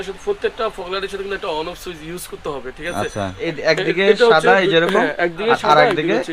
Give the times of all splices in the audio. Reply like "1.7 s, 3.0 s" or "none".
3.4 s